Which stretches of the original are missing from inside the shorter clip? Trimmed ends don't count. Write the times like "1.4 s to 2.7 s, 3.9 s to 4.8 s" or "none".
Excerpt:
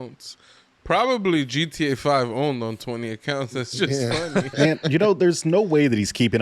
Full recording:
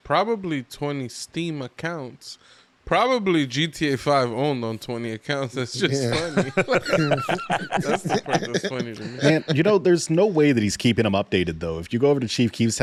6.5 s to 9.1 s